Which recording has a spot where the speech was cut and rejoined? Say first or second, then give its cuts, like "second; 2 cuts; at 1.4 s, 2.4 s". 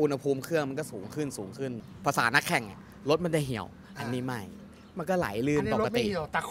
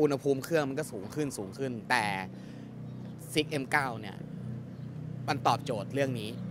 first; 1 cut; at 1.8 s